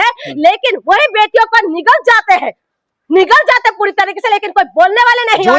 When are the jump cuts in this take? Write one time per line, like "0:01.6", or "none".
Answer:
none